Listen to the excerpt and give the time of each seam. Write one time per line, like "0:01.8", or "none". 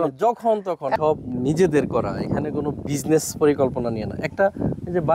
0:00.9